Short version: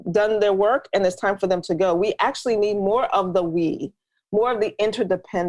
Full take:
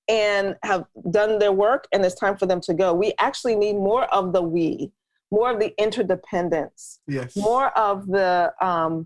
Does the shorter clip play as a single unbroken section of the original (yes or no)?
yes